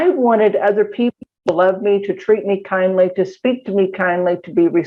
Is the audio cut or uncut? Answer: uncut